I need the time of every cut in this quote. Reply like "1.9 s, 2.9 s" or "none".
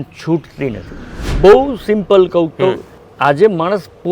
1.3 s